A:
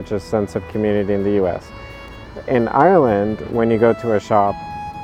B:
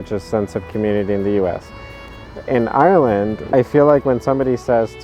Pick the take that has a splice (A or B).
B